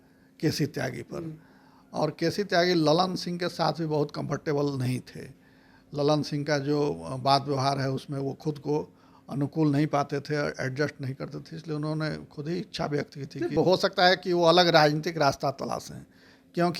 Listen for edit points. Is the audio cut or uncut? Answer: uncut